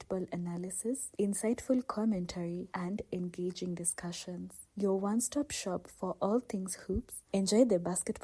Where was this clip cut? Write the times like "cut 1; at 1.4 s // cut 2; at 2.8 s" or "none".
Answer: cut 1; at 7.2 s